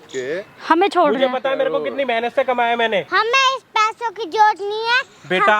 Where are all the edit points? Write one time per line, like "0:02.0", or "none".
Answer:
0:03.1